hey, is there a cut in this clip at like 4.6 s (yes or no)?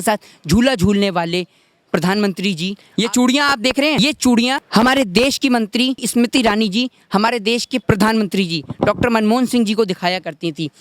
yes